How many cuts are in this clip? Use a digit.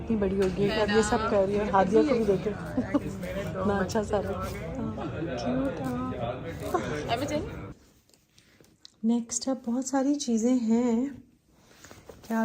1